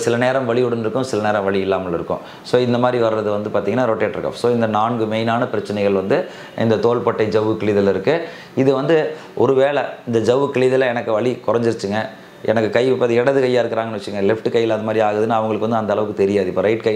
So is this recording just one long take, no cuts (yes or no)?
yes